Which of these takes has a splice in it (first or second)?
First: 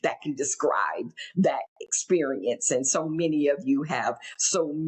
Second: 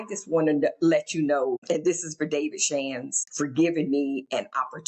second